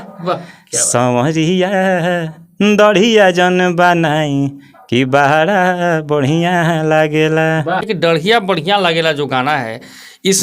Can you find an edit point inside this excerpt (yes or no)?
yes